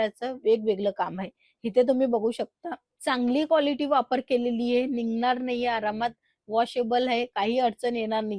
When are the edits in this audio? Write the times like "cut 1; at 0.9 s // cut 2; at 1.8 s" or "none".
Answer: none